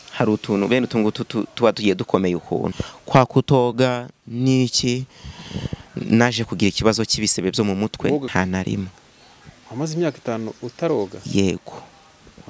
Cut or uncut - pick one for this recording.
cut